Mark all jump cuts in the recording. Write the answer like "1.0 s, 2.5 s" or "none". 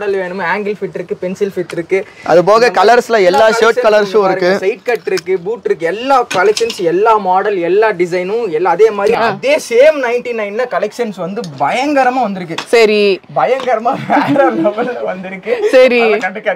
9.1 s